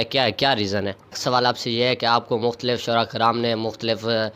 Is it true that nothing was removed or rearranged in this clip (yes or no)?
no